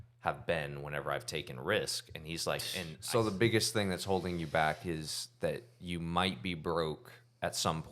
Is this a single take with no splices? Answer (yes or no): no